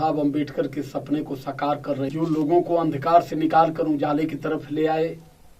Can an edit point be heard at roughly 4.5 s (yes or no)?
no